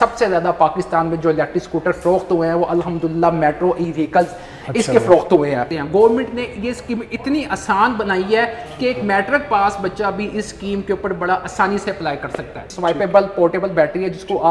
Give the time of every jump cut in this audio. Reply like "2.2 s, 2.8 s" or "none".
5.7 s, 12.6 s